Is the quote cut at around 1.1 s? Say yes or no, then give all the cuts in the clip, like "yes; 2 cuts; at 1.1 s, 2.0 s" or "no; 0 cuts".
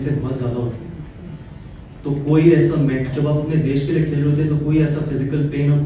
no; 0 cuts